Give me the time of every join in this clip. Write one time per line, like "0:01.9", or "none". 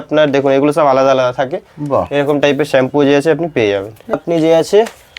0:04.1